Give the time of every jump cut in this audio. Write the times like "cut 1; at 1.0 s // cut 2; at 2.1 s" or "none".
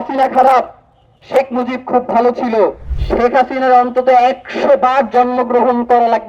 cut 1; at 2.9 s